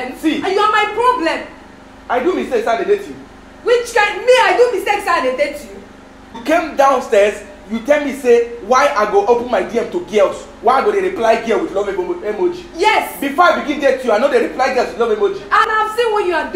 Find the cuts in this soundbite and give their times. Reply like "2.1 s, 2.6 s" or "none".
6.2 s, 15.7 s